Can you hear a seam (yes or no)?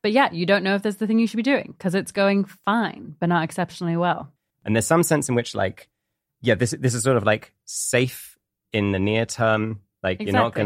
yes